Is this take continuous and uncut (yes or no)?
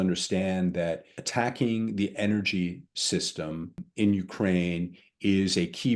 no